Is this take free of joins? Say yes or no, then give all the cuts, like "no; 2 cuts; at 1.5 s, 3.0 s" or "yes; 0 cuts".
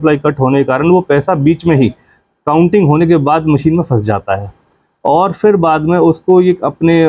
yes; 0 cuts